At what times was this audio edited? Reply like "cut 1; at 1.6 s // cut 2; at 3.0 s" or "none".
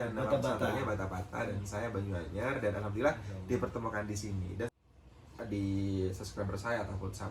cut 1; at 4.8 s